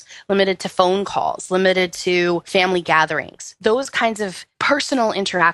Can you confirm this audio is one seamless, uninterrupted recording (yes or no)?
no